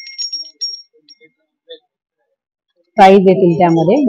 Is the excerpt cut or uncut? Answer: uncut